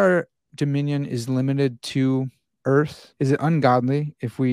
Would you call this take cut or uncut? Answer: cut